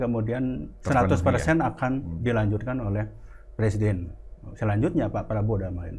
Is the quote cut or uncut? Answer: uncut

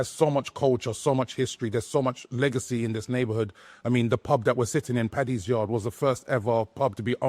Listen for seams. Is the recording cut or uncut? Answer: uncut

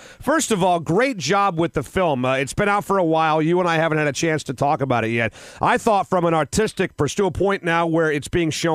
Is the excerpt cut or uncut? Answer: uncut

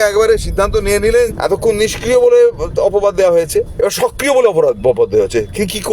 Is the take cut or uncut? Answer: cut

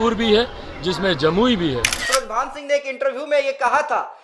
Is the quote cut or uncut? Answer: cut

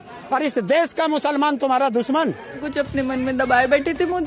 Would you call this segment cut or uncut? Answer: cut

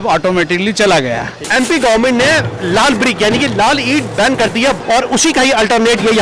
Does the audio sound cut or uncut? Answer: cut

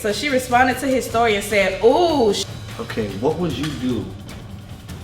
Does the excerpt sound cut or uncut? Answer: cut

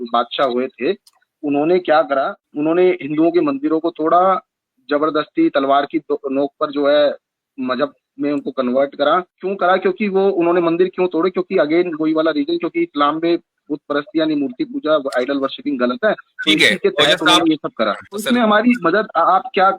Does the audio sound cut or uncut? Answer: cut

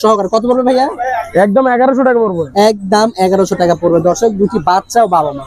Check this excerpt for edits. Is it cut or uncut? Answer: uncut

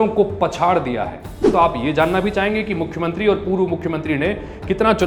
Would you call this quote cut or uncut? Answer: cut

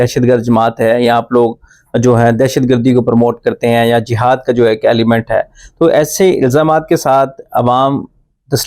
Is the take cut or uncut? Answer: uncut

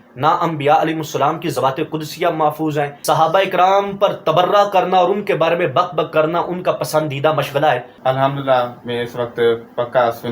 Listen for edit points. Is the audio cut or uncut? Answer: cut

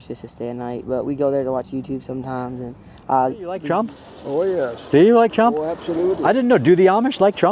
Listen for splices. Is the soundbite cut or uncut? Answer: cut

